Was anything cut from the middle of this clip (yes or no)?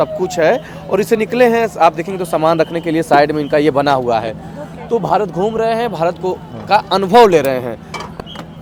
no